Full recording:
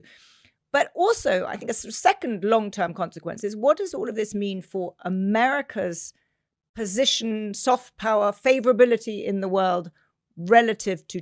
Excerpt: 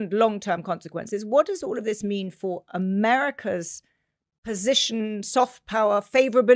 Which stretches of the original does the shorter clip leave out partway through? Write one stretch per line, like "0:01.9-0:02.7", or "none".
none